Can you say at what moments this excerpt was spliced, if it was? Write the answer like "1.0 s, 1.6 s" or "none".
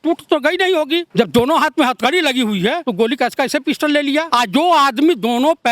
1.1 s, 2.8 s, 4.3 s